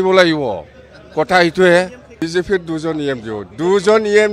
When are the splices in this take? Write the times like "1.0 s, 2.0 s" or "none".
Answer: 2.0 s